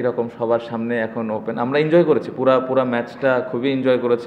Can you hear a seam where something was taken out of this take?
no; 0 cuts

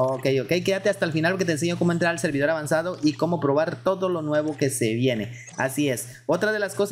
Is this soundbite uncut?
yes; 0 cuts

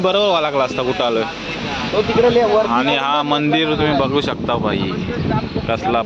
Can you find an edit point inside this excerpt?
no; 0 cuts

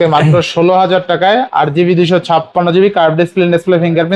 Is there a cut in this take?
no; 0 cuts

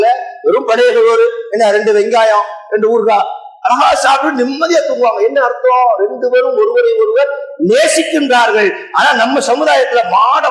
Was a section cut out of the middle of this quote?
no; 0 cuts

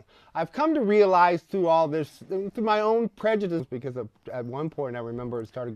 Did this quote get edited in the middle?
no; 0 cuts

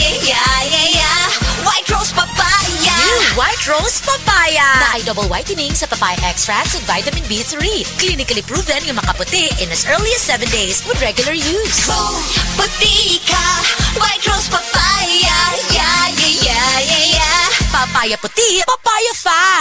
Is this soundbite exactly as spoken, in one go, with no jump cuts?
yes; 0 cuts

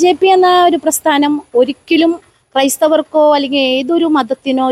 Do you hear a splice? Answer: no; 0 cuts

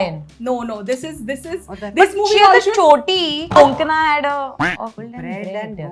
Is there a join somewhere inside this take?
yes; 2 cuts; at 3.6 s, 5.0 s

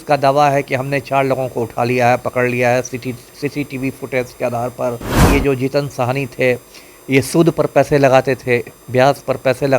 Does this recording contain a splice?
yes; 1 cut; at 5.2 s

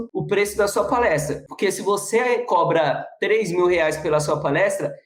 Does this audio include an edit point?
no; 0 cuts

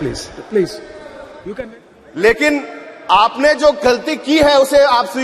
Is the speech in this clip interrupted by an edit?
yes; 1 cut; at 1.4 s

